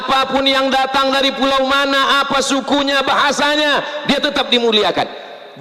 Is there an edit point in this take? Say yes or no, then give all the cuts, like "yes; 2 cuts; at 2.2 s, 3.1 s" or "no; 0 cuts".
no; 0 cuts